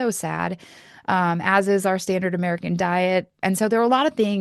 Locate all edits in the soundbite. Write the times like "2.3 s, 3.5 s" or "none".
3.4 s